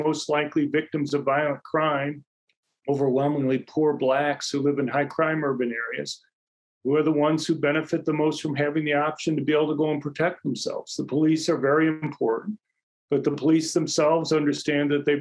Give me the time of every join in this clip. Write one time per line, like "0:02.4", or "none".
none